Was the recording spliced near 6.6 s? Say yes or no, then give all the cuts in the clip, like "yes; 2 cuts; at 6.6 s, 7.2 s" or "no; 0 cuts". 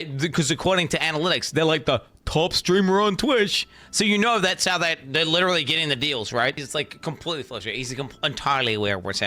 yes; 1 cut; at 6.6 s